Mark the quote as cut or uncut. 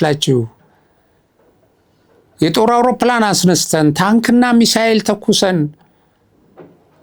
uncut